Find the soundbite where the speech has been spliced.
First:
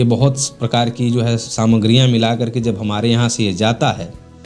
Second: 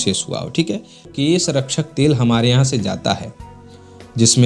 second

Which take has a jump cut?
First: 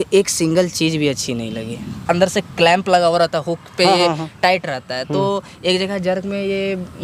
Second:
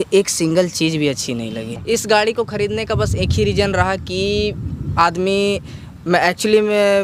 first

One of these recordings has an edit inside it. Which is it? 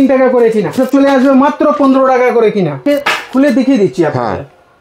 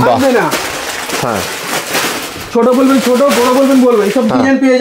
first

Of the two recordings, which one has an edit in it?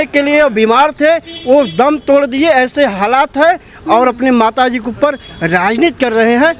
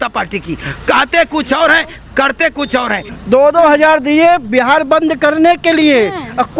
second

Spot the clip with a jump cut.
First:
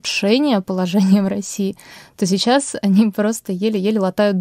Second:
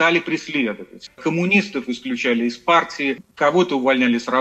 second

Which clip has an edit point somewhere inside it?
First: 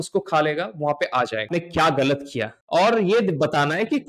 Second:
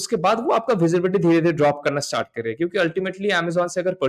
first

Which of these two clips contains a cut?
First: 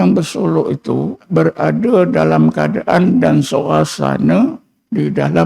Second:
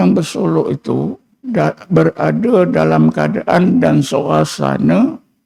first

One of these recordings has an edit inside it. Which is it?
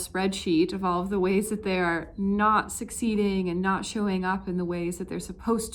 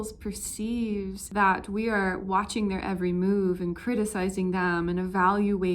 second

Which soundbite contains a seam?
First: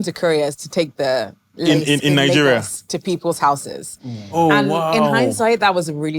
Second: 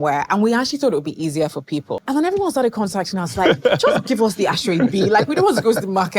second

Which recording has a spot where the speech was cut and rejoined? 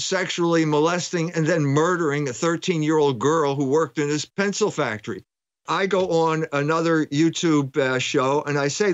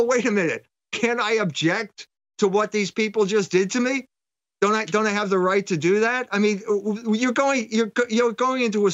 first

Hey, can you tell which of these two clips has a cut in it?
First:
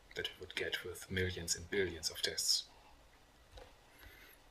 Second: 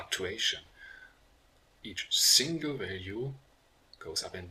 first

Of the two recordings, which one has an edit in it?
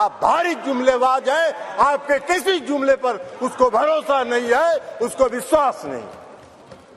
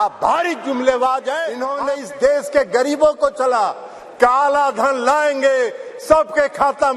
second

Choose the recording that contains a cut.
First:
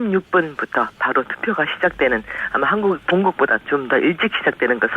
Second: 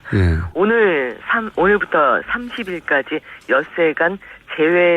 first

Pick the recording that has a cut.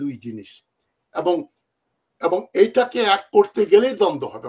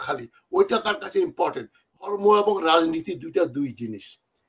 second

